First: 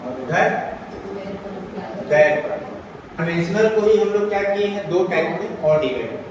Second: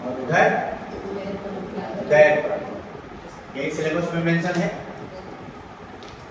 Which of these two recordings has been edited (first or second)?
first